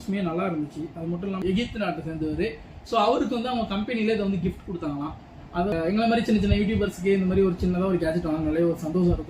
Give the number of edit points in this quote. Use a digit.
2